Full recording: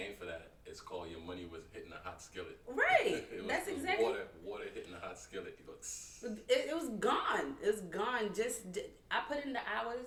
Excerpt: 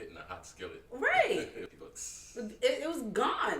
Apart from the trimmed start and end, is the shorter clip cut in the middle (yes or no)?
yes